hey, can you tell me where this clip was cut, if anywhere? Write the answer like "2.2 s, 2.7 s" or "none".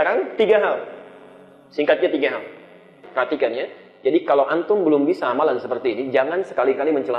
3.0 s